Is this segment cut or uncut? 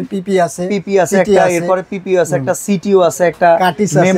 uncut